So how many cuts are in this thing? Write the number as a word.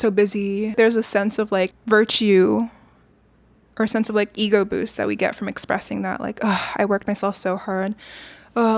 two